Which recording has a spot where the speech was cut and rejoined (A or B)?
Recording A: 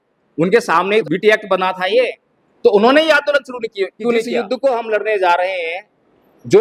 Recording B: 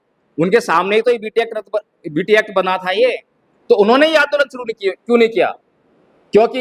A